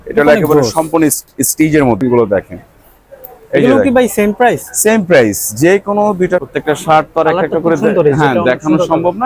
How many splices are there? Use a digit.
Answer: 2